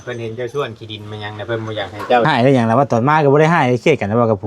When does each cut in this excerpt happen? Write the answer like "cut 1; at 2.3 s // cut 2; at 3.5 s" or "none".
cut 1; at 2.2 s

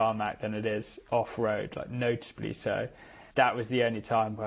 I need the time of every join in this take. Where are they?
cut 1; at 3.2 s

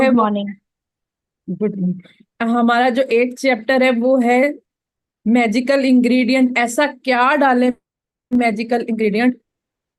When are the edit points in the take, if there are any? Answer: cut 1; at 3.5 s // cut 2; at 6.3 s

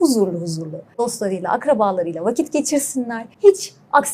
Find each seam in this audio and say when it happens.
cut 1; at 0.9 s // cut 2; at 3.2 s

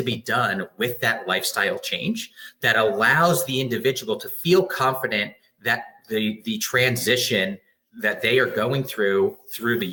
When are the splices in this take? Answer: none

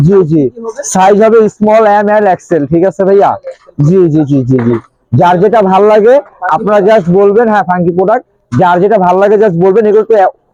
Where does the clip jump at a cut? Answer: none

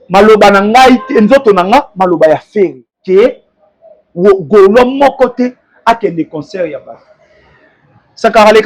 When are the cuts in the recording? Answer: cut 1; at 2.9 s

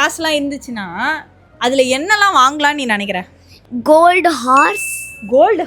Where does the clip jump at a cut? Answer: cut 1; at 3.6 s

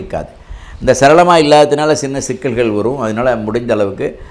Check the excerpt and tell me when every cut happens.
none

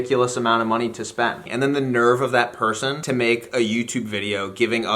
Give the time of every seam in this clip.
cut 1; at 1.4 s // cut 2; at 3.0 s

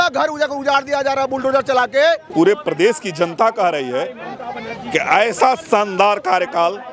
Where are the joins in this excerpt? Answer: cut 1; at 2.2 s

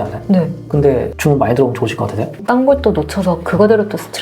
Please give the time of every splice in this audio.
cut 1; at 0.8 s // cut 2; at 2.4 s

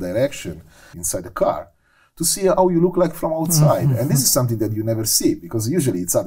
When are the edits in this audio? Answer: cut 1; at 1.0 s

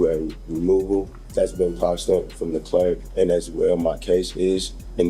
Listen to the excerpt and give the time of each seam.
cut 1; at 1.2 s // cut 2; at 3.0 s

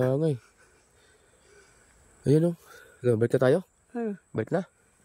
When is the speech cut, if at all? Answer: none

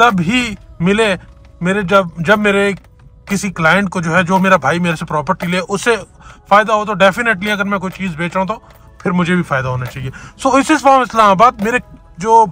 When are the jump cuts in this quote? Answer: none

